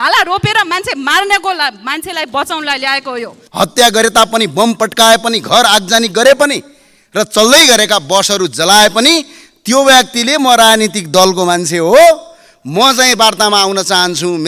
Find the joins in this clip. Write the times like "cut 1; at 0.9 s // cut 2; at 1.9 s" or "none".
cut 1; at 3.4 s